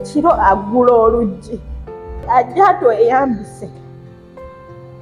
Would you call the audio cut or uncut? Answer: cut